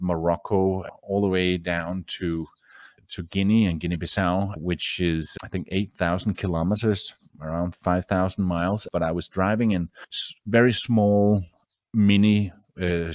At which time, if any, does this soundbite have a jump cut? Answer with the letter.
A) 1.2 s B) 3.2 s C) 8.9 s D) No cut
C